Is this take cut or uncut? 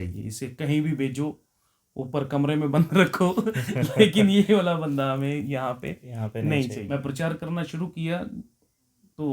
cut